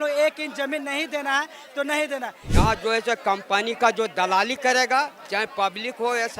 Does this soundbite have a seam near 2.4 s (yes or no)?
yes